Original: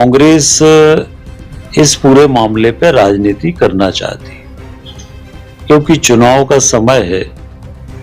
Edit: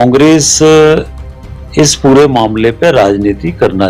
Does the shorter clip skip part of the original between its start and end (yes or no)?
no